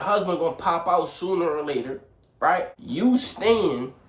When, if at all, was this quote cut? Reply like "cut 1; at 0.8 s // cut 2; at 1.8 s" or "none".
cut 1; at 2.8 s